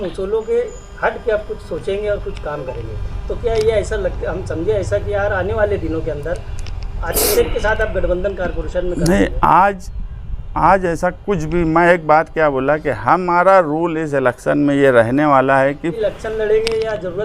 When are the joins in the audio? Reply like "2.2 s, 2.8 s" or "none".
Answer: 16.0 s